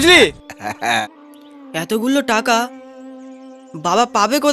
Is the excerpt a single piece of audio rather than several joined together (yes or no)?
no